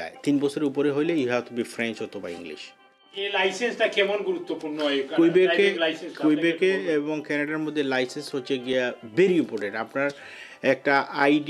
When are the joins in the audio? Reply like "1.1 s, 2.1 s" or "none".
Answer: 3.2 s